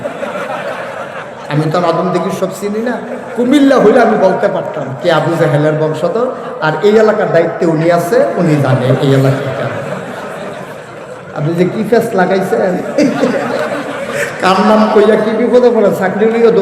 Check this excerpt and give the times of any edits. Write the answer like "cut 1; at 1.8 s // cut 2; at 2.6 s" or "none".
none